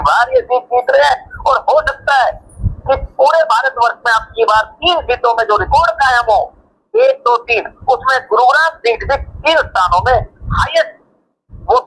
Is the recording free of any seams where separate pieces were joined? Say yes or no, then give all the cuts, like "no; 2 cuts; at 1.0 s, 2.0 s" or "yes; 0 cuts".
no; 1 cut; at 10.6 s